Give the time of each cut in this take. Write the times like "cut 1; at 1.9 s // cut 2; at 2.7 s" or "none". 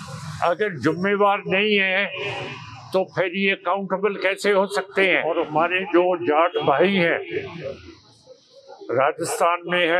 cut 1; at 5.2 s